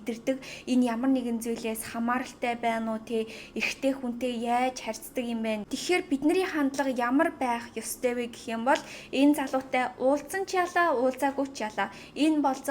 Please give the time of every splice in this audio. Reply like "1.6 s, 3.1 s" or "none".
5.7 s